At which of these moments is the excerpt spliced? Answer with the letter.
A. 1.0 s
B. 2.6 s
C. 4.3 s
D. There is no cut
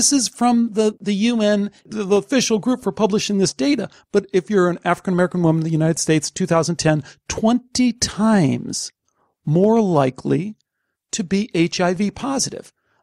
A